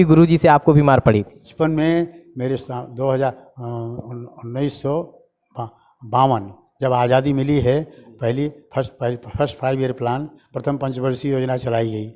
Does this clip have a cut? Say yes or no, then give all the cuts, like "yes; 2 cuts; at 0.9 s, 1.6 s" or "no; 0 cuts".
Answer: yes; 1 cut; at 1.4 s